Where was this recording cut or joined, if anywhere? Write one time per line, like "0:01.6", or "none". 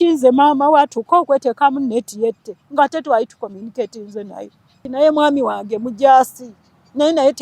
0:04.9